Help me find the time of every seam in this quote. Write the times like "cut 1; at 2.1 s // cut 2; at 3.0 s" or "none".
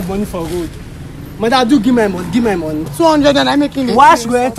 cut 1; at 2.9 s